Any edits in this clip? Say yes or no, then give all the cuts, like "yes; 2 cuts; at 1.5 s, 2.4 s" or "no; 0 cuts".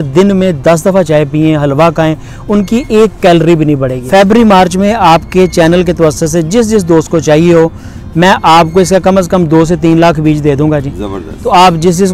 yes; 1 cut; at 4.0 s